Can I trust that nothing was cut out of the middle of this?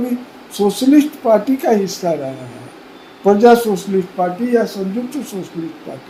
yes; 0 cuts

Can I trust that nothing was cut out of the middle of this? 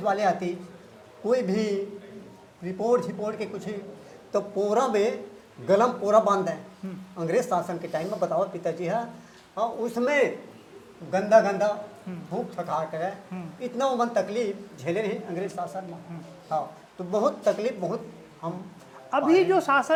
yes; 0 cuts

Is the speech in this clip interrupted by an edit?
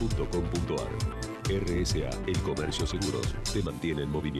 no; 0 cuts

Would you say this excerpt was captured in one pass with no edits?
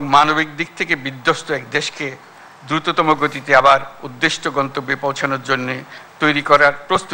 yes; 0 cuts

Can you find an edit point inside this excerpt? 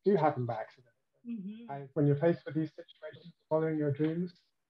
yes; 1 cut; at 1.6 s

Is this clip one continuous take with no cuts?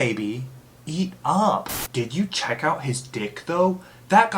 no; 1 cut; at 1.7 s

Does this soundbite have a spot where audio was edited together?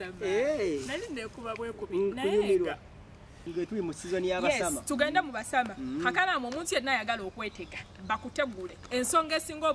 yes; 1 cut; at 3.5 s

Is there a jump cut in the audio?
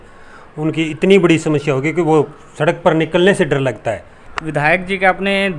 yes; 1 cut; at 4.1 s

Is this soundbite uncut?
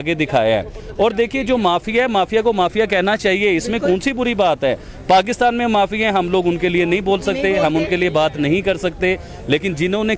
yes; 0 cuts

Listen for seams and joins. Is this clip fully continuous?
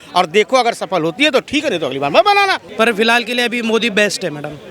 no; 1 cut; at 2.7 s

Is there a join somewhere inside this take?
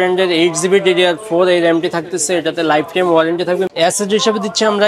yes; 1 cut; at 3.7 s

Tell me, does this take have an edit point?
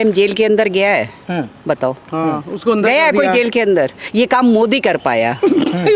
no; 0 cuts

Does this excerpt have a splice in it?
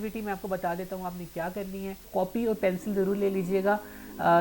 yes; 1 cut; at 2.1 s

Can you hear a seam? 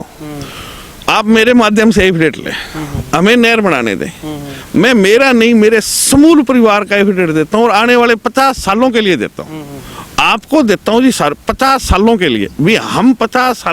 no; 0 cuts

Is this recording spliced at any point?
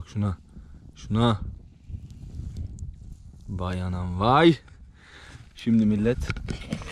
no; 0 cuts

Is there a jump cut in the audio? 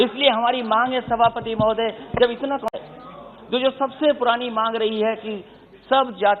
yes; 1 cut; at 2.8 s

